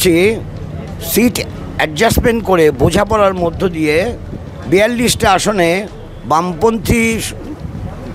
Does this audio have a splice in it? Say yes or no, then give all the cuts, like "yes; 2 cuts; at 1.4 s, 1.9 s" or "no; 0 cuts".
no; 0 cuts